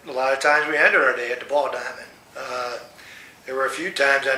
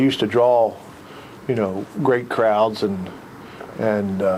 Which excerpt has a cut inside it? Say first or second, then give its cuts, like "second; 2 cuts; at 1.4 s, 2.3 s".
first; 1 cut; at 1.8 s